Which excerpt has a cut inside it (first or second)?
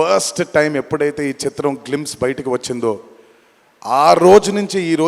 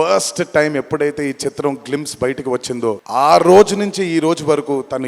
second